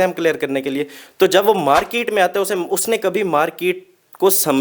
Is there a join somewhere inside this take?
no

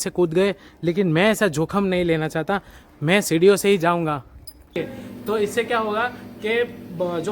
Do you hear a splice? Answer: yes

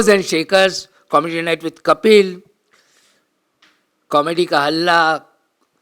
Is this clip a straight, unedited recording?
yes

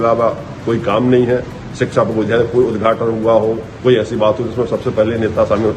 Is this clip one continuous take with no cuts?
yes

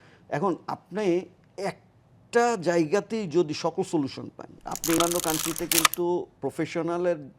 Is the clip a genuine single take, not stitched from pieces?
no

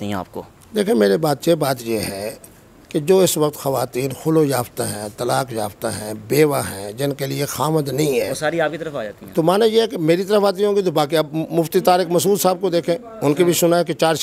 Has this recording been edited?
no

